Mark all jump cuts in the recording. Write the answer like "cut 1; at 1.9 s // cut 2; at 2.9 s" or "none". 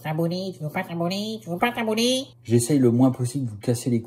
cut 1; at 2.3 s